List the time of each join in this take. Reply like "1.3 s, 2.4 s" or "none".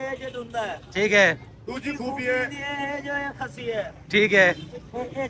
none